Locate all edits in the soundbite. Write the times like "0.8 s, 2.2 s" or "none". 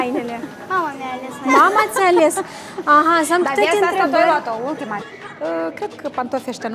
5.1 s